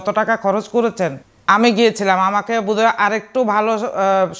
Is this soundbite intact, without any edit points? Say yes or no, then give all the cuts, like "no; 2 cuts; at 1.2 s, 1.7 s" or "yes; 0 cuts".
no; 1 cut; at 1.3 s